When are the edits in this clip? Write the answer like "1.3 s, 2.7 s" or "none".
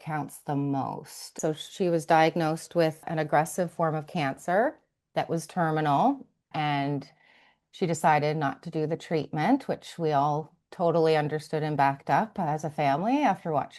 1.3 s, 3.0 s, 6.5 s